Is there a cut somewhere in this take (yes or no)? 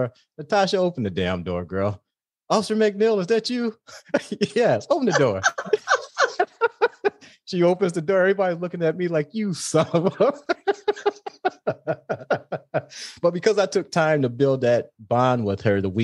no